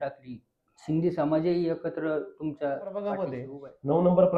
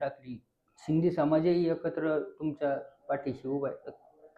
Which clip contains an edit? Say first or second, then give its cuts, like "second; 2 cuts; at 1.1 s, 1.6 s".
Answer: first; 1 cut; at 3.4 s